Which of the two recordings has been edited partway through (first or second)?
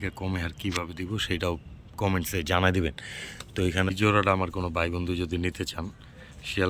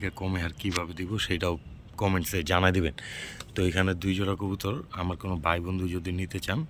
first